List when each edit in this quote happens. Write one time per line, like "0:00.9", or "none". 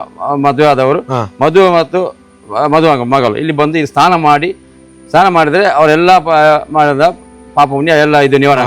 none